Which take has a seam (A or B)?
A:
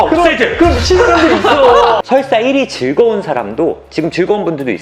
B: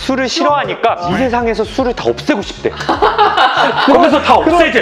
A